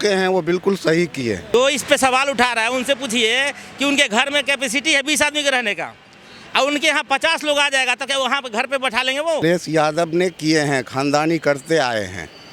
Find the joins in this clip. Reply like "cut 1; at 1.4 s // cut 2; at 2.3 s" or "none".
cut 1; at 1.5 s // cut 2; at 9.4 s